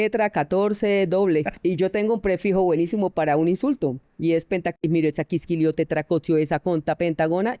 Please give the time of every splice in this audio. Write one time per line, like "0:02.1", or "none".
0:01.5